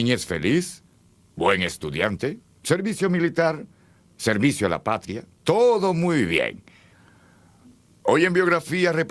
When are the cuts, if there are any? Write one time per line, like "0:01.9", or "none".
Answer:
0:05.8